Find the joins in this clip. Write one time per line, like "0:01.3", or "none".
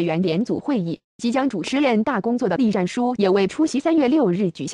0:01.0